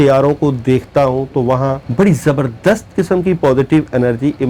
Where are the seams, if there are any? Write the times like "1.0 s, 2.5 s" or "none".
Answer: 1.8 s

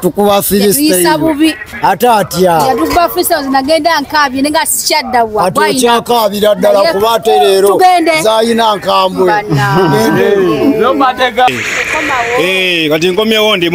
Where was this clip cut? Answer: 11.5 s

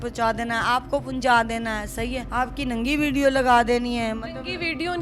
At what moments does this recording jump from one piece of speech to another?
2.2 s

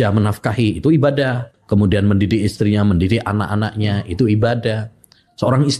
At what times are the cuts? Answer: 1.5 s

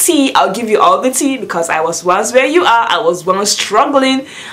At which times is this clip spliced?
3.3 s

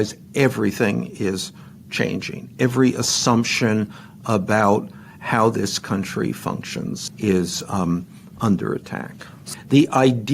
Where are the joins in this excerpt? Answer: 7.1 s, 9.4 s

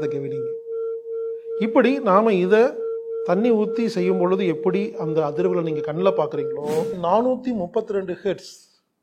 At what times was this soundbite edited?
7.0 s

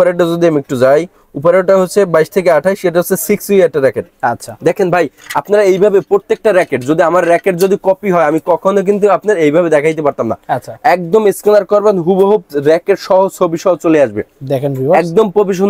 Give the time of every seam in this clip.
none

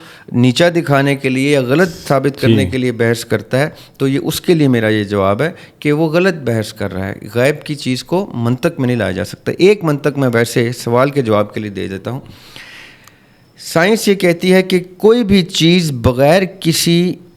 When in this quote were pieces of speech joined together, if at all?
none

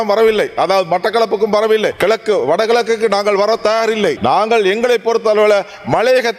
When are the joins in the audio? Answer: 2.0 s, 4.2 s

